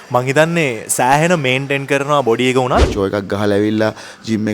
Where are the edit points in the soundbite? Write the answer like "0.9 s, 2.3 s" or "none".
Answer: 2.9 s